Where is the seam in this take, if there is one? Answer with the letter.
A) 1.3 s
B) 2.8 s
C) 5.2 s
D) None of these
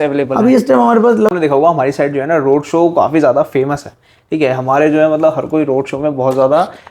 A